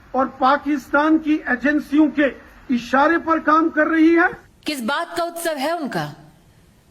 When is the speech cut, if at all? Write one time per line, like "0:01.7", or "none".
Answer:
0:04.3